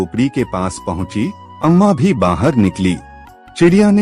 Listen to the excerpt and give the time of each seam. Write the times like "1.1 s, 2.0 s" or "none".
1.4 s